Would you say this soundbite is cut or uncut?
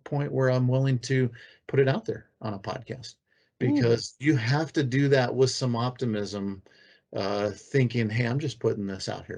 uncut